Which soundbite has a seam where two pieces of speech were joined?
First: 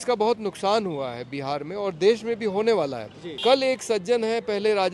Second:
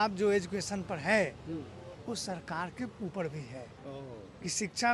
first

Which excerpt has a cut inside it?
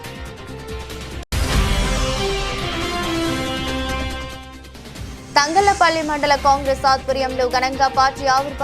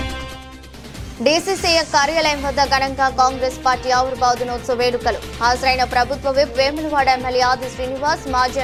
first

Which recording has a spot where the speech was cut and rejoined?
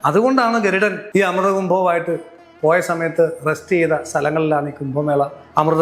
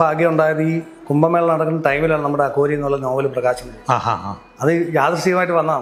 first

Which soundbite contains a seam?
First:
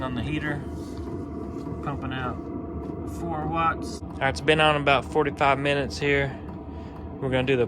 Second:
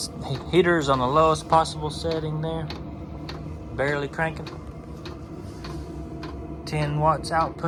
first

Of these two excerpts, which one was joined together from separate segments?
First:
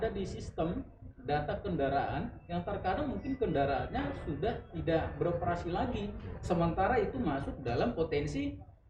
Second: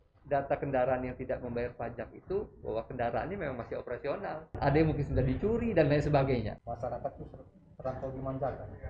second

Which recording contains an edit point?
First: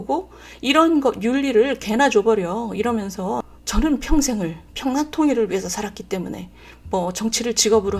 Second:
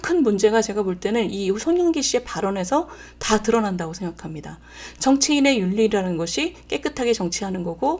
first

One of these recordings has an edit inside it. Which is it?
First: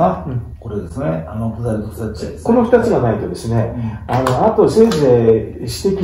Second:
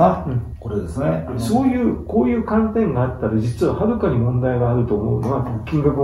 second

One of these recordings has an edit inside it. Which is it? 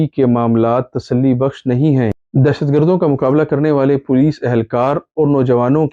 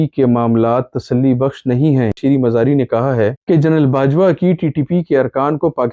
second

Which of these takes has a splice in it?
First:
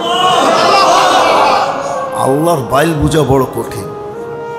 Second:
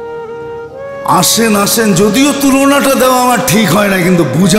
first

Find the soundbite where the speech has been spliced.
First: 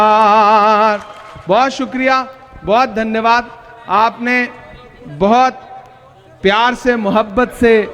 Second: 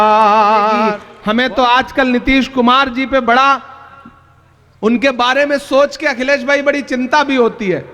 second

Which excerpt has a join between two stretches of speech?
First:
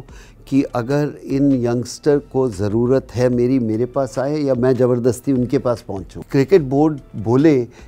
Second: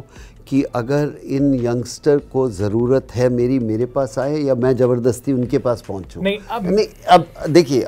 first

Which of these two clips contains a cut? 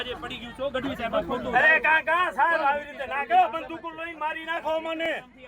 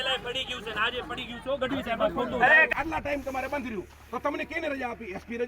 second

